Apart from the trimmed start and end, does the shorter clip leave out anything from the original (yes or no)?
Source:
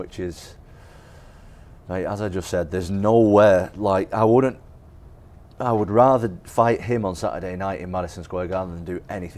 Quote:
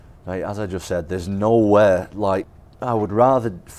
yes